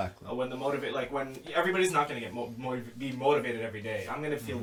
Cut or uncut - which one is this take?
uncut